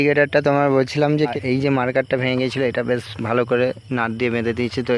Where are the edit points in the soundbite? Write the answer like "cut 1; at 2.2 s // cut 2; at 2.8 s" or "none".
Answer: cut 1; at 1.4 s